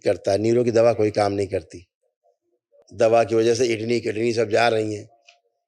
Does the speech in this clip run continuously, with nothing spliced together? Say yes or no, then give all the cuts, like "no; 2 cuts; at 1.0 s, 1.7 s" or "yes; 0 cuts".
no; 1 cut; at 2.8 s